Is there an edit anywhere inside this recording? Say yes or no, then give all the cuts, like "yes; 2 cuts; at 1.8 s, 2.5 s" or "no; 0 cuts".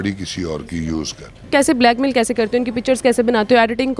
yes; 1 cut; at 1.4 s